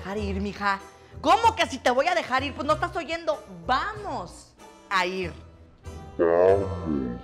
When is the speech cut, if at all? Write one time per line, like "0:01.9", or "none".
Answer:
none